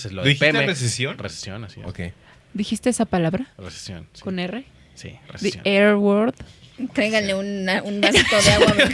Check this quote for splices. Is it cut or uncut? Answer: uncut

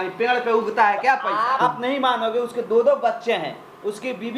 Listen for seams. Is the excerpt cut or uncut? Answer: cut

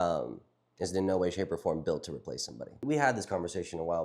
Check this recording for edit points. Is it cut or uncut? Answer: cut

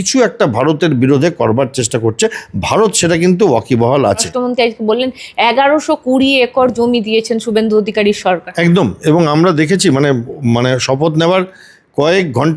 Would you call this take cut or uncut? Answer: cut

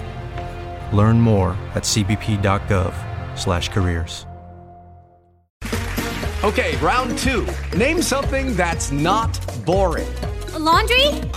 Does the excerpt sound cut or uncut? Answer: cut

